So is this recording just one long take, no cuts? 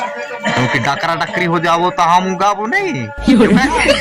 no; 1 cut; at 3.0 s

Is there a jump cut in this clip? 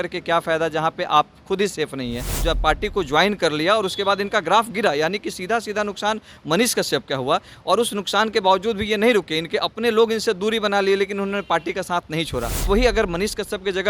yes; 2 cuts; at 2.3 s, 12.6 s

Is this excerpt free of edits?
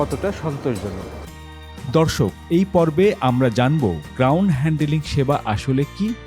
no; 1 cut; at 1.4 s

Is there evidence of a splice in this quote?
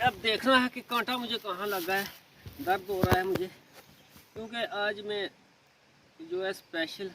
no; 0 cuts

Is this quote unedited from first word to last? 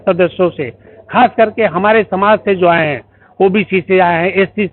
yes; 0 cuts

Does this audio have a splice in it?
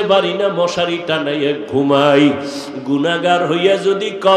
no; 0 cuts

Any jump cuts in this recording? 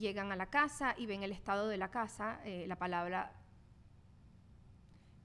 no; 0 cuts

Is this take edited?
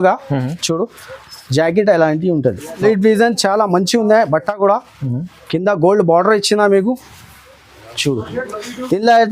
yes; 1 cut; at 2.8 s

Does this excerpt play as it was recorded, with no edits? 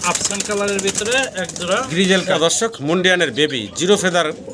no; 1 cut; at 2.3 s

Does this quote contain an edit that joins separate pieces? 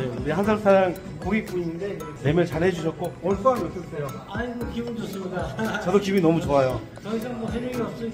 no; 0 cuts

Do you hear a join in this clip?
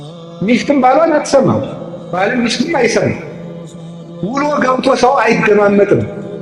no; 0 cuts

